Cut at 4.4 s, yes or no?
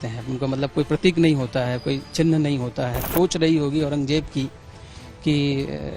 no